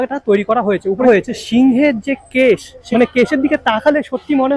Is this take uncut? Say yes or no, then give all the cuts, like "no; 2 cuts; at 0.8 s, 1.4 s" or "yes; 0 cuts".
no; 2 cuts; at 1.0 s, 2.7 s